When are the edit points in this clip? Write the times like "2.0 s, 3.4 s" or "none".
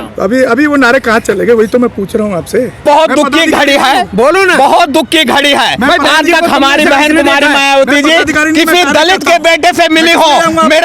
2.8 s

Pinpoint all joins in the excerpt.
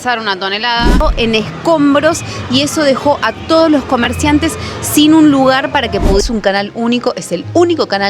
1.0 s, 6.2 s

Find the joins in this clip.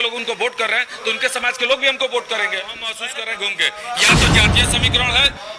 3.0 s

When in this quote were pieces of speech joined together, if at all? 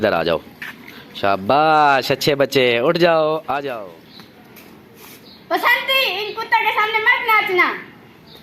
3.7 s

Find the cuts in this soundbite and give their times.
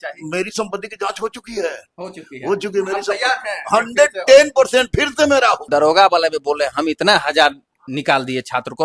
5.6 s

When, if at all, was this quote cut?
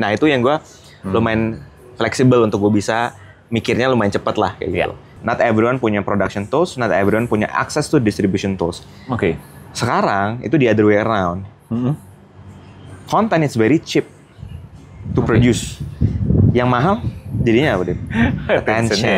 5.1 s

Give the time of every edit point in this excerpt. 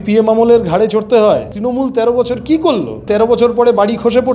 1.5 s, 3.0 s

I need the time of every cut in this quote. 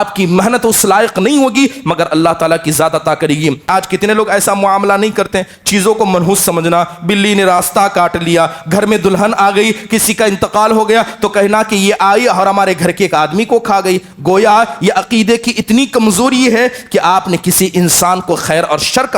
3.6 s

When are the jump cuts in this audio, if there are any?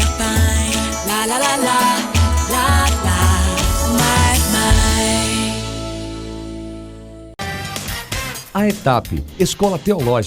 7.3 s

